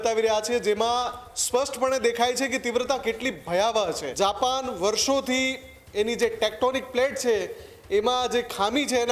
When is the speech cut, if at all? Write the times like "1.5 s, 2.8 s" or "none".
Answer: 4.1 s